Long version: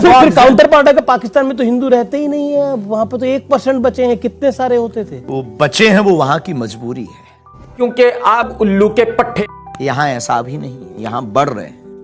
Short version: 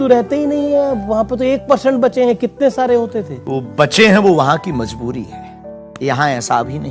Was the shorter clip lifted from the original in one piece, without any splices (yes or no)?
no